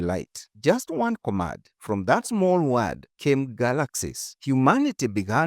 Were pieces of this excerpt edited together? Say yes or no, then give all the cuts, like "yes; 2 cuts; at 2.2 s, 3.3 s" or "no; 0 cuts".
no; 0 cuts